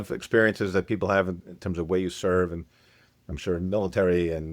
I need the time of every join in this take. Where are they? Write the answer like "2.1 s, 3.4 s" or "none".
1.4 s